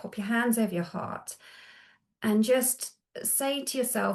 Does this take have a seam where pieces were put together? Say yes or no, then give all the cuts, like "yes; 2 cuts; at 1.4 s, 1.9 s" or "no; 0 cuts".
no; 0 cuts